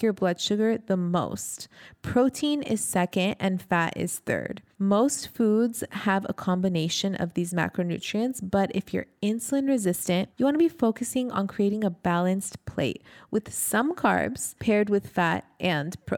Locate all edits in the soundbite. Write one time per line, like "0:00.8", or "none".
0:04.6
0:10.3
0:14.5